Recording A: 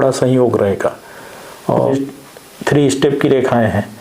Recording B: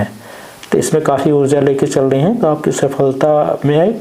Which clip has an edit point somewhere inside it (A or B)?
A